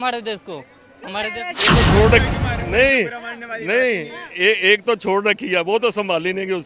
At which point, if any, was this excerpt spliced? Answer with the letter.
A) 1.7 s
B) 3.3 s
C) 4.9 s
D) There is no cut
A